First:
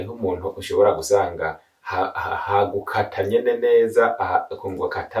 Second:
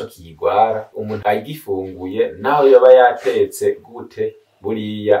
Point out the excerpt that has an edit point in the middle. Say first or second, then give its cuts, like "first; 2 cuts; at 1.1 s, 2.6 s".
second; 1 cut; at 1.1 s